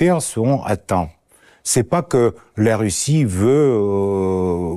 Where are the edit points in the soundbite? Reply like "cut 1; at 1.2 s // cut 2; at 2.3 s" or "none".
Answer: none